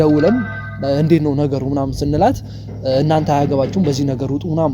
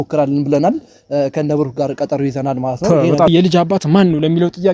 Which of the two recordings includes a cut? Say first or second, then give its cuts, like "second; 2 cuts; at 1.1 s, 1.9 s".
second; 1 cut; at 3.3 s